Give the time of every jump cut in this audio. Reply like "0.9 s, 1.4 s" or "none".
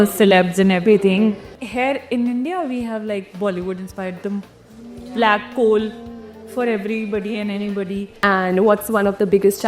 1.6 s, 8.2 s